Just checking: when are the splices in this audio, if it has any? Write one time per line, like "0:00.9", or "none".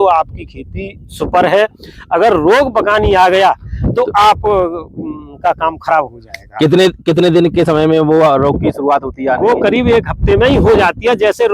none